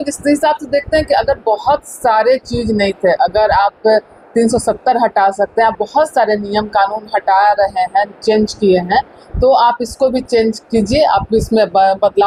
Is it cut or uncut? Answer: uncut